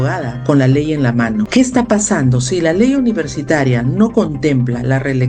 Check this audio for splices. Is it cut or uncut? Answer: cut